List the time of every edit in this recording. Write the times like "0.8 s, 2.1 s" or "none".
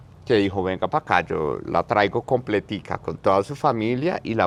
none